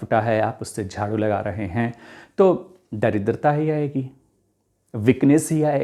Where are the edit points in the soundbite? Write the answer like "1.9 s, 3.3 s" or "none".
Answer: none